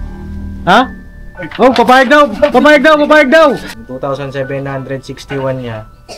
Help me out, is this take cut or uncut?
cut